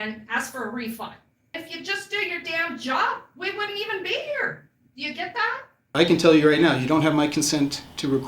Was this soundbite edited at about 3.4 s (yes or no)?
no